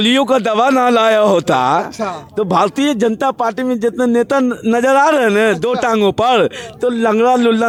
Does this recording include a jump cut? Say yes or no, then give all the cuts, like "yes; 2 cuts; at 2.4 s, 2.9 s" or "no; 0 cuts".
no; 0 cuts